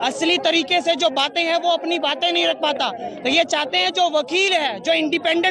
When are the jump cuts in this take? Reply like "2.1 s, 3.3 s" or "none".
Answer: none